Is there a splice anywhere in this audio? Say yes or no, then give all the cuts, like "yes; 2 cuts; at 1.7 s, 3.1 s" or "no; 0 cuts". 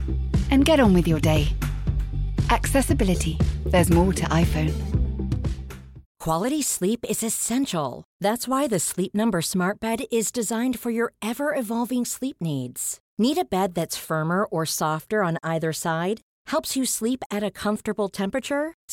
yes; 1 cut; at 6.0 s